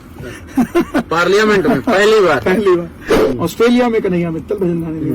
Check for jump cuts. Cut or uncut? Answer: cut